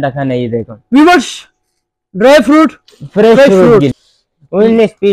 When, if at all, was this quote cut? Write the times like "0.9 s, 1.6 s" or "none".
3.9 s